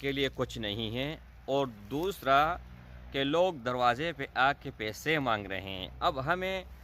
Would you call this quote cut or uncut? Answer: uncut